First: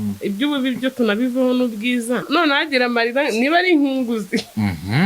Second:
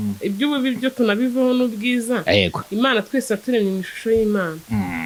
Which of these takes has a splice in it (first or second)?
first